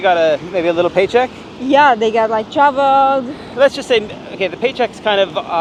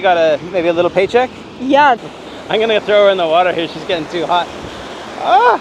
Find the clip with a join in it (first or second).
second